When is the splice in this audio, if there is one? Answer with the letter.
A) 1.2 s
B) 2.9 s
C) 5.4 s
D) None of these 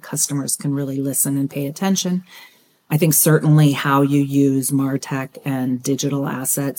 B